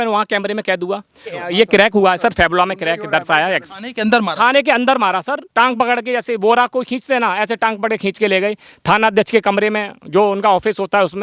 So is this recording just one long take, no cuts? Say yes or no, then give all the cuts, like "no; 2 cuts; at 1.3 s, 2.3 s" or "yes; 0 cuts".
no; 3 cuts; at 1.3 s, 3.7 s, 5.4 s